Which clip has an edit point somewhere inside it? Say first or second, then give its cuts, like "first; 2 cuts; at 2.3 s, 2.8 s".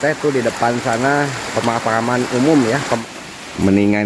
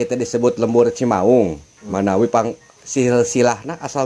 first; 1 cut; at 3.0 s